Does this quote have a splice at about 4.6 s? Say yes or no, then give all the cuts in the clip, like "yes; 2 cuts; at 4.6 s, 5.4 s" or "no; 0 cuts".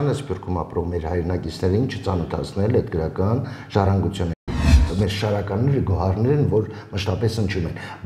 yes; 1 cut; at 4.6 s